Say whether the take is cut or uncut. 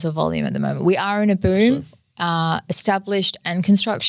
uncut